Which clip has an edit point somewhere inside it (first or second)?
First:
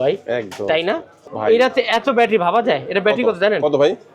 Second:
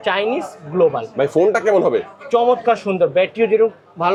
first